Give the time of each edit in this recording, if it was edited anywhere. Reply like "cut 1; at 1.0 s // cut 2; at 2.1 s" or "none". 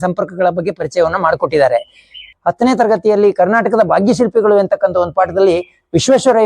cut 1; at 2.2 s